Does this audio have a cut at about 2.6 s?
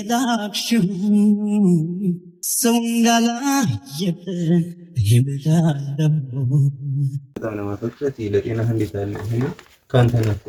no; 0 cuts

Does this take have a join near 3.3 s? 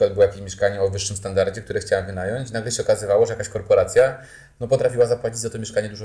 no; 0 cuts

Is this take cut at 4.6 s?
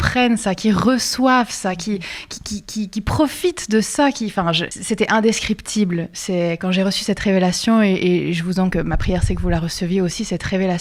no; 0 cuts

